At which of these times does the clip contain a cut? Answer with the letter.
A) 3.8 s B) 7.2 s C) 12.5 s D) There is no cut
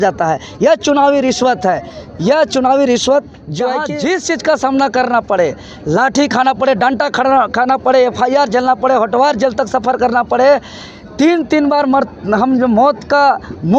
A